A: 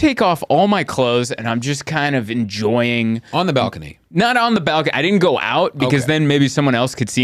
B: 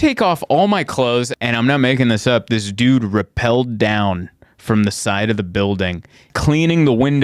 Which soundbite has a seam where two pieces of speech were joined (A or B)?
B